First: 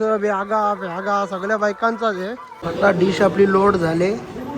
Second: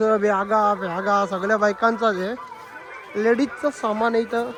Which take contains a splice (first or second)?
first